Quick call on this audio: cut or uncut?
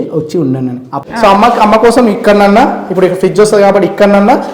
cut